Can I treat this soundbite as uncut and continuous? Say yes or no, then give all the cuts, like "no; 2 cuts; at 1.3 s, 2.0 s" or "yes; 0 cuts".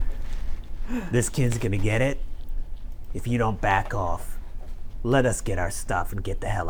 yes; 0 cuts